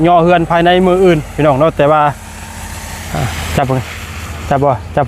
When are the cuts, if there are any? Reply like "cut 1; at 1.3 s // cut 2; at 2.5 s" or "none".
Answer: none